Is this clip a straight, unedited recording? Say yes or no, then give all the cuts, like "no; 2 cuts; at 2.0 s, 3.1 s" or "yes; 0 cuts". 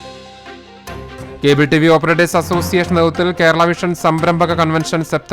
no; 1 cut; at 1.2 s